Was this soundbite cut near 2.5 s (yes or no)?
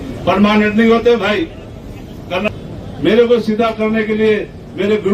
yes